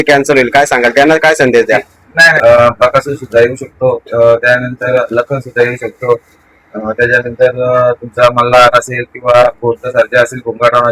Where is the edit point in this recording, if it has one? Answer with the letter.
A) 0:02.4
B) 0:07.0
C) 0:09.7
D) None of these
A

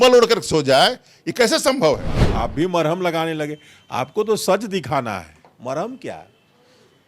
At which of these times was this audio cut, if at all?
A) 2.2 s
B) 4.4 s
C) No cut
A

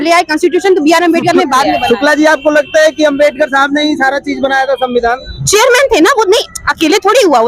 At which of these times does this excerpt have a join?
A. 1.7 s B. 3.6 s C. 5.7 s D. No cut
A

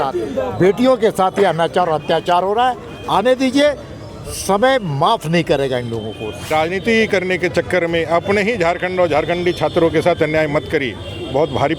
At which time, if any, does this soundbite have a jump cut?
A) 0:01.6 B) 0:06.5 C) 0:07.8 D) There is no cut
B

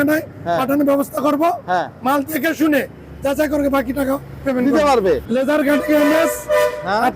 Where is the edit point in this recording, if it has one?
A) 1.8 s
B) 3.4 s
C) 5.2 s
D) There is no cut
C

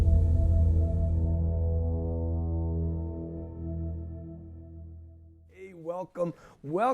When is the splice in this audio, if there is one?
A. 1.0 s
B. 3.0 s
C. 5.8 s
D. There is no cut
C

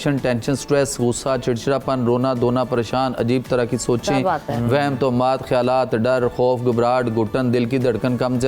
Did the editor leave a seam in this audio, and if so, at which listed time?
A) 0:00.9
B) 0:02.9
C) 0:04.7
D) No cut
D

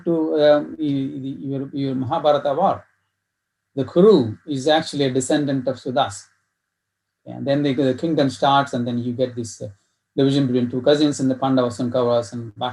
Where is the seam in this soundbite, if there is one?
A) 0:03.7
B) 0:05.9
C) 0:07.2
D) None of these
D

